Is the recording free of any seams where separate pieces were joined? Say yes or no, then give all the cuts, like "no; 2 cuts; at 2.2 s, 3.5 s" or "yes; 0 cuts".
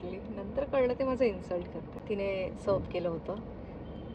no; 1 cut; at 1.9 s